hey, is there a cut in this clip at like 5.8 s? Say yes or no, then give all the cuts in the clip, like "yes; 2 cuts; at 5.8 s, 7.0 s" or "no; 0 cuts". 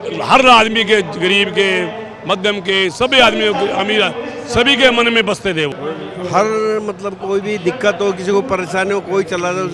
yes; 1 cut; at 5.8 s